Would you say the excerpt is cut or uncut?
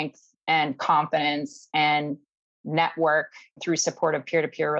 cut